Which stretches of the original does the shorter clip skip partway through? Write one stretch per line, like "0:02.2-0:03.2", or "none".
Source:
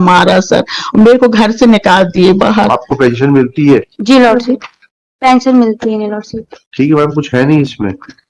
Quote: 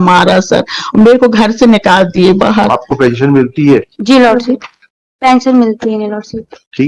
none